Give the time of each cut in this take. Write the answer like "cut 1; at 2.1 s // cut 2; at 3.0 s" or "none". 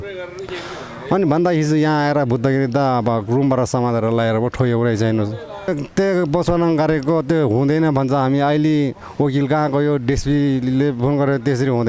cut 1; at 5.7 s